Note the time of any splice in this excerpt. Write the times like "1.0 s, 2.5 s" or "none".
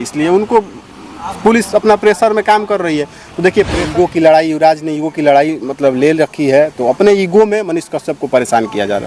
3.8 s